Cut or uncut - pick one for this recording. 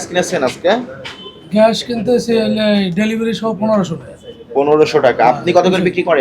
uncut